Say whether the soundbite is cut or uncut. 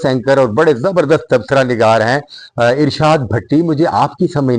uncut